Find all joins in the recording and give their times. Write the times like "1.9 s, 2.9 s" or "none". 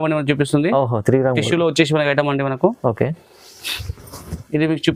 none